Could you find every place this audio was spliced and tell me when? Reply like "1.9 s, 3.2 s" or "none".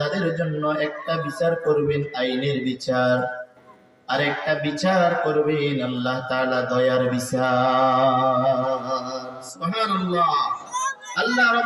10.7 s